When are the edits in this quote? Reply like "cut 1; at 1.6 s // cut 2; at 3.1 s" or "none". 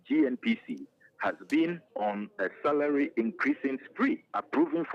none